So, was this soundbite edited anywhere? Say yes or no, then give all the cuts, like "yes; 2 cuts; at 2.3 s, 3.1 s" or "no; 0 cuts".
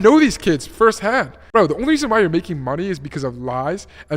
yes; 1 cut; at 1.4 s